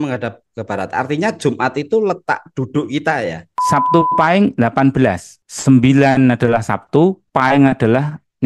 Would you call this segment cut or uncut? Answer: cut